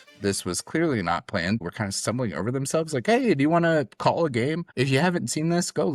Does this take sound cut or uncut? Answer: cut